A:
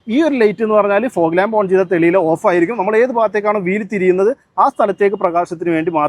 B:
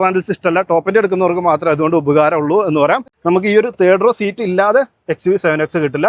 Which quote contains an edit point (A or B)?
B